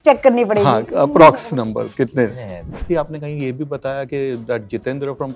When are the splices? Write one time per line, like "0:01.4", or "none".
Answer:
0:02.9